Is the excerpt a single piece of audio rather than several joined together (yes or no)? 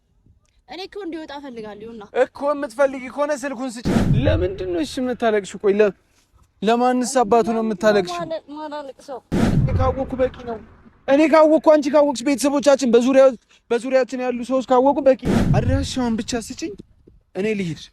no